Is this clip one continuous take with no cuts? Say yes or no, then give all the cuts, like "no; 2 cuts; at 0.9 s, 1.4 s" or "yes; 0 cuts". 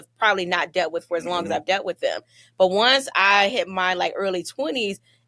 yes; 0 cuts